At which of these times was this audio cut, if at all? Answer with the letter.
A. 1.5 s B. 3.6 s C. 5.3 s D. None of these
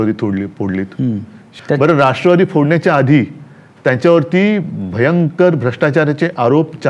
A